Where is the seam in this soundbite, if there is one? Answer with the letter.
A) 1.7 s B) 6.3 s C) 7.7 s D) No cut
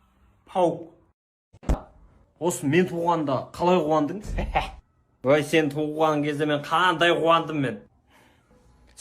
A